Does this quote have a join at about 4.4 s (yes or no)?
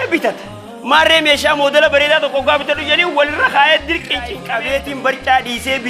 yes